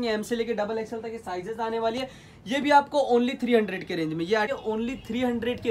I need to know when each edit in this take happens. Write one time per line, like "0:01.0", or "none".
0:04.5